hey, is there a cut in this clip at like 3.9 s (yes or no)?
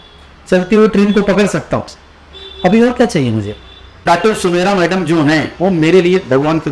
yes